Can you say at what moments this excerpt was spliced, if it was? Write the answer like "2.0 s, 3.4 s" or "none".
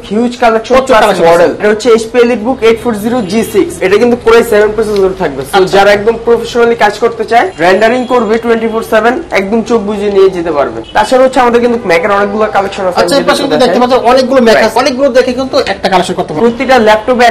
1.6 s, 3.7 s, 7.5 s, 10.8 s, 14.8 s, 16.3 s